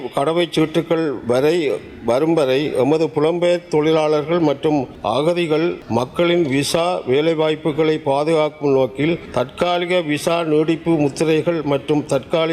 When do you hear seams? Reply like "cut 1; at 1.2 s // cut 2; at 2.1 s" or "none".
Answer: cut 1; at 4.9 s // cut 2; at 5.8 s // cut 3; at 9.2 s